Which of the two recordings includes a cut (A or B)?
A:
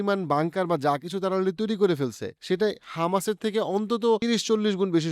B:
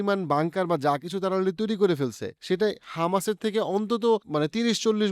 A